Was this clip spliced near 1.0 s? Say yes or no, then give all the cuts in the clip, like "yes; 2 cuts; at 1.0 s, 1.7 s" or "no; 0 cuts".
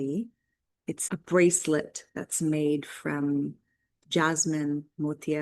yes; 1 cut; at 1.0 s